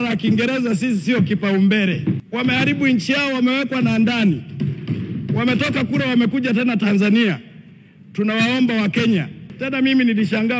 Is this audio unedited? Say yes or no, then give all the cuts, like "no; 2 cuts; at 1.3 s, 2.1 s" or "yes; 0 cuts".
no; 2 cuts; at 2.2 s, 9.5 s